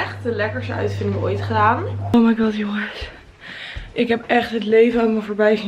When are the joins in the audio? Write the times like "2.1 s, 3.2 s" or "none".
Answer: 2.0 s

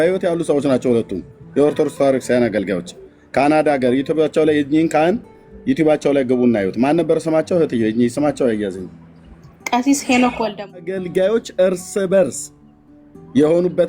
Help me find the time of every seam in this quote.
10.8 s

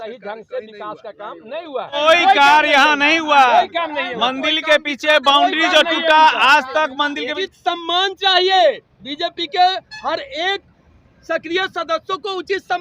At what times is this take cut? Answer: 2.0 s, 7.3 s

